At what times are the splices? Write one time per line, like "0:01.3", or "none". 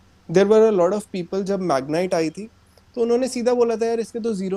none